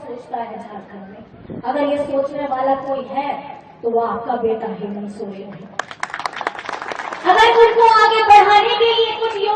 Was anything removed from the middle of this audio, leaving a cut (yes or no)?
no